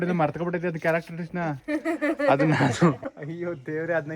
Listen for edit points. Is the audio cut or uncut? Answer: cut